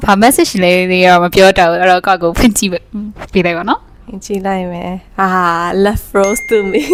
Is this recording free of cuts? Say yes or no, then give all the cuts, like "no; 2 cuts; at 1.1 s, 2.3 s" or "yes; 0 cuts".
yes; 0 cuts